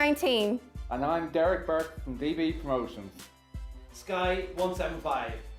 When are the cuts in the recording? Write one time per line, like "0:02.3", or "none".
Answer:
none